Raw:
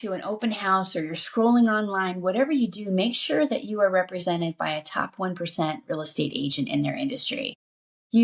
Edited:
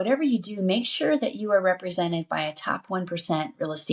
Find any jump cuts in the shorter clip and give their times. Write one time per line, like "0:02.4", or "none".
none